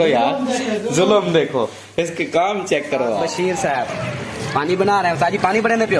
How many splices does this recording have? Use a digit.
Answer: 1